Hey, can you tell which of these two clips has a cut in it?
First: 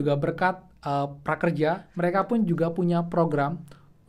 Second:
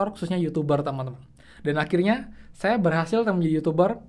first; 1 cut; at 1.9 s

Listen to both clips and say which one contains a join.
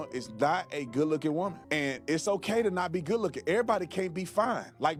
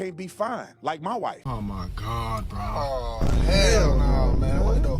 second; 1 cut; at 1.4 s

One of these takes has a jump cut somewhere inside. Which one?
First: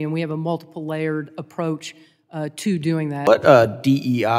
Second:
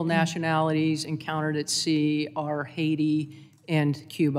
first; 1 cut; at 3.2 s

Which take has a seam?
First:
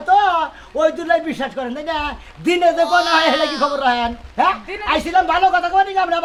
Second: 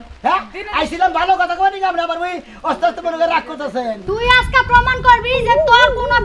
second; 1 cut; at 4.2 s

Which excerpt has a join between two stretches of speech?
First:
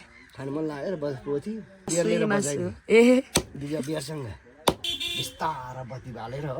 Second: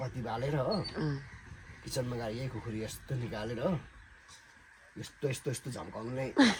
first; 2 cuts; at 1.9 s, 5.0 s

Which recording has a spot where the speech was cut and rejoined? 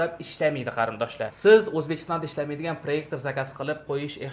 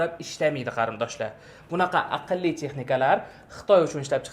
first; 1 cut; at 1.4 s

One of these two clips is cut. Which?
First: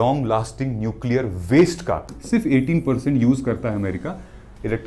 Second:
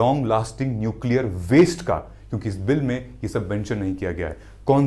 first; 1 cut; at 2.1 s

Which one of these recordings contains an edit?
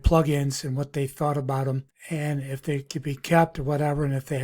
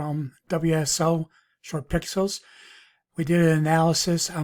first; 1 cut; at 1.9 s

